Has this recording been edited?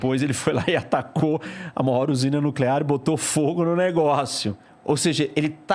yes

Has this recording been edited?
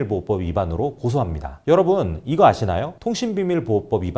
yes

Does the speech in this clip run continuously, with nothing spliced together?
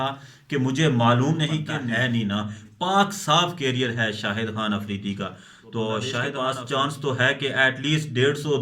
no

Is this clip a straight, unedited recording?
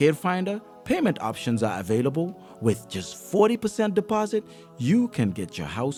yes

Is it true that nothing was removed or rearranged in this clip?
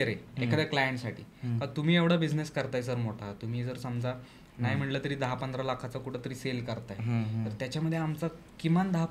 yes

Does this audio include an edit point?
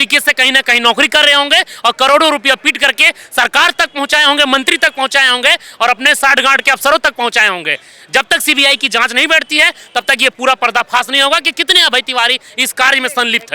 no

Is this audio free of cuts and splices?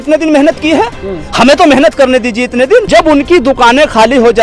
no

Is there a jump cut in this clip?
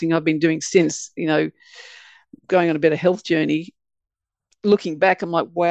no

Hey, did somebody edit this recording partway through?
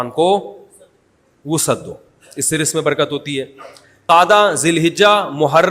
yes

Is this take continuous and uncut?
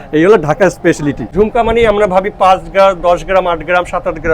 no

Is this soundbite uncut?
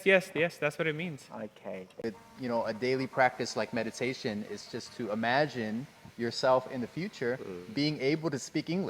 no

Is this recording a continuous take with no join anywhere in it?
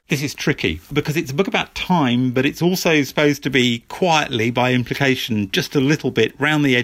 no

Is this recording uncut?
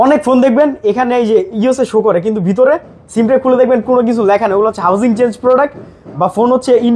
yes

